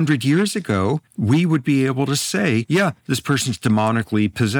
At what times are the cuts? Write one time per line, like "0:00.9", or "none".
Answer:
0:01.1
0:02.7